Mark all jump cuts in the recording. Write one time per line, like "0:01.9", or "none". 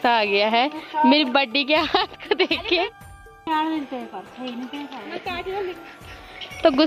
none